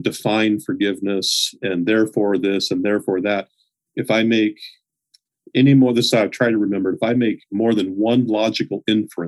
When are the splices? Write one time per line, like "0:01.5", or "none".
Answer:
none